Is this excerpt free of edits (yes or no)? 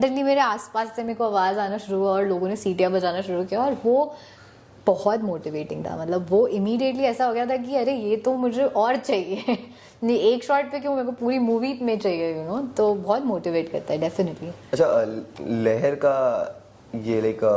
yes